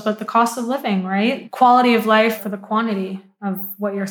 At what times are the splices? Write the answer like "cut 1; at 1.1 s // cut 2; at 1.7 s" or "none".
cut 1; at 1.4 s // cut 2; at 2.4 s